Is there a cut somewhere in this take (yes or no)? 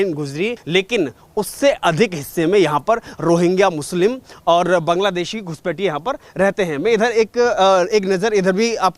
no